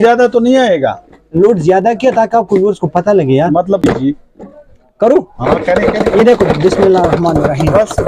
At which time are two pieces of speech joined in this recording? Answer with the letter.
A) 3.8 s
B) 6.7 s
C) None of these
A